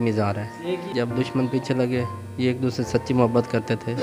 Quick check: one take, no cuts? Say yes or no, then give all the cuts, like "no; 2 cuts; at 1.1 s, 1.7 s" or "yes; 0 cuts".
no; 1 cut; at 0.9 s